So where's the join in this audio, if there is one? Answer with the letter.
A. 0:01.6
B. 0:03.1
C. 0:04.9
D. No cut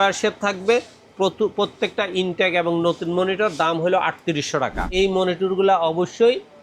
C